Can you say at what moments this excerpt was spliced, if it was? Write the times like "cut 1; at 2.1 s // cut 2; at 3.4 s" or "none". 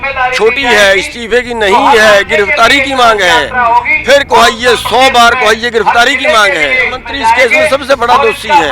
cut 1; at 7.0 s